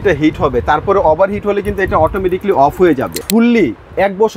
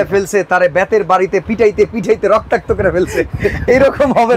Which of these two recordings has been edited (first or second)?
first